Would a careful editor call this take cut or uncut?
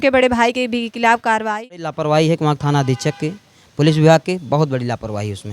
cut